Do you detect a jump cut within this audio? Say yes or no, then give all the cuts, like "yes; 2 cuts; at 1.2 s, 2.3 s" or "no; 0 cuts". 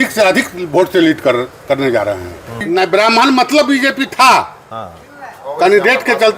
yes; 1 cut; at 2.6 s